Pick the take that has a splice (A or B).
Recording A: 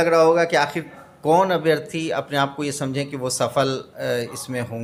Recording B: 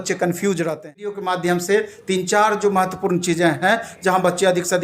B